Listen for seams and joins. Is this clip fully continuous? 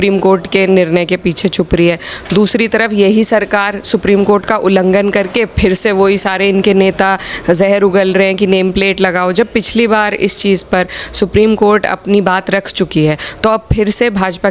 yes; 0 cuts

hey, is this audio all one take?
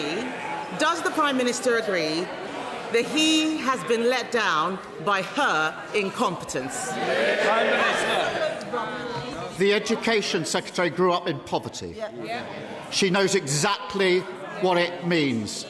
yes; 0 cuts

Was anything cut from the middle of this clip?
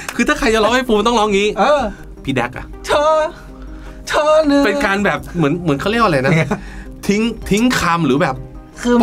yes; 1 cut; at 2.2 s

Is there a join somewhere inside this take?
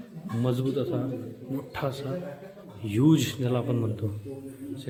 no; 0 cuts

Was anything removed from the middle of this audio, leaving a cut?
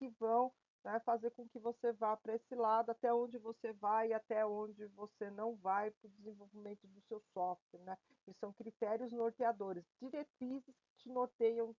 no; 0 cuts

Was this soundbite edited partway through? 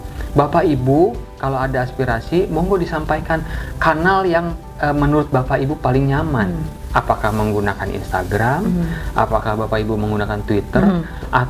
no; 0 cuts

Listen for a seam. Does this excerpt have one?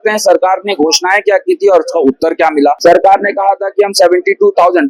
yes; 1 cut; at 2.8 s

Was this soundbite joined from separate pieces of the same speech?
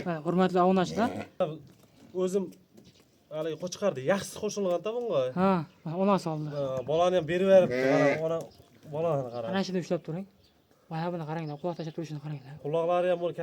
yes; 1 cut; at 1.4 s

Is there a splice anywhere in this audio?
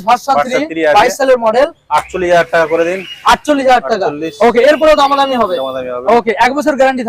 no; 0 cuts

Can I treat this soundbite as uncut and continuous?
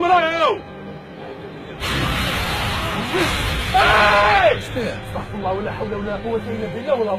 no; 1 cut; at 1.3 s

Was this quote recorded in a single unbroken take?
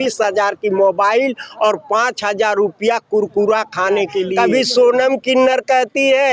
no; 1 cut; at 4.3 s

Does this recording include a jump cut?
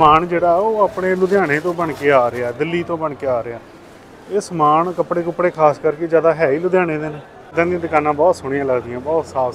yes; 1 cut; at 7.5 s

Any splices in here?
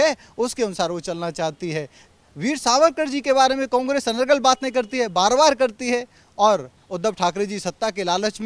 no; 0 cuts

